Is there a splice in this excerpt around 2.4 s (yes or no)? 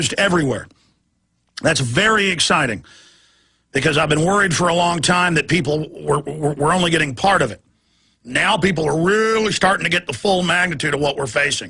yes